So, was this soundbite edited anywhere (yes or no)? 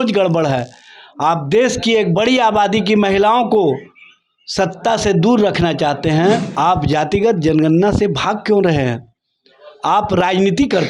yes